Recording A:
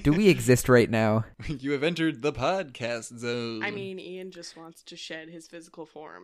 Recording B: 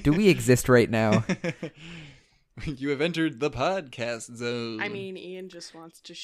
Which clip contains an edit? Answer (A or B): A